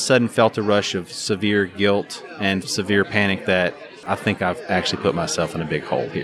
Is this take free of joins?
no; 2 cuts; at 2.7 s, 3.9 s

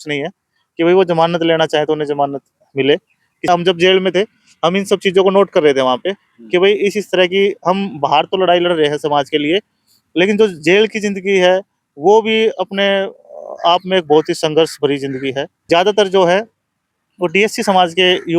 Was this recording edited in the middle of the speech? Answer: yes; 2 cuts; at 3.5 s, 15.5 s

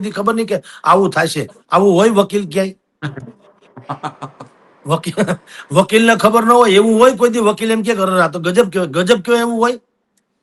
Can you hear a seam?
no; 0 cuts

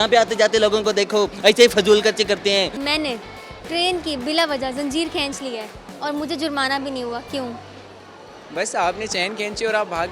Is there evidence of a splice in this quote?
yes; 1 cut; at 2.8 s

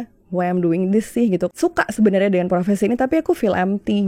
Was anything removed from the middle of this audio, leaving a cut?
yes; 1 cut; at 1.5 s

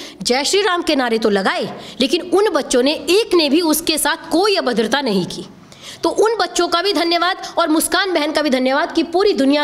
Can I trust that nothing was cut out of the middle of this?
yes; 0 cuts

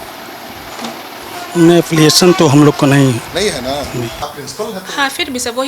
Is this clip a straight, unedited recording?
no; 1 cut; at 4.1 s

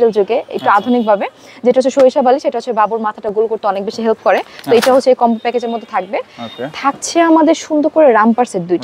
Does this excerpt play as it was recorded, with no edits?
yes; 0 cuts

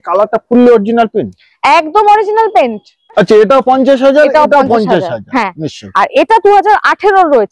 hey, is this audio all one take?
no; 1 cut; at 3.1 s

